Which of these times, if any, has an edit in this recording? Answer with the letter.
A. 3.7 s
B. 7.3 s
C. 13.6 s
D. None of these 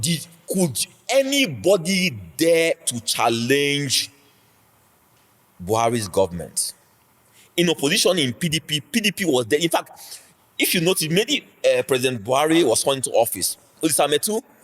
C